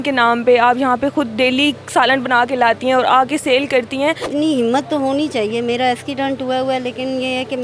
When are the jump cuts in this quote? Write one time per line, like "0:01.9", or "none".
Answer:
0:04.2